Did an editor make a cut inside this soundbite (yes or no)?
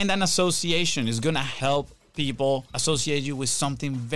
yes